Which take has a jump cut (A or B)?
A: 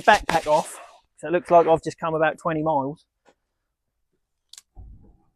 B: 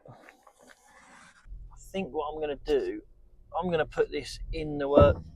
B